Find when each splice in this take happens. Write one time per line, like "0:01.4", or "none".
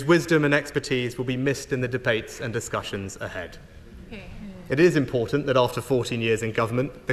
none